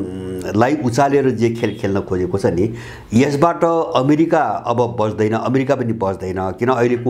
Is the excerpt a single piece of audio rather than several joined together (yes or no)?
yes